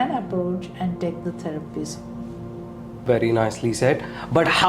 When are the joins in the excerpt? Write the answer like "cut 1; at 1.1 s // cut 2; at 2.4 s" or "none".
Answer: cut 1; at 3.0 s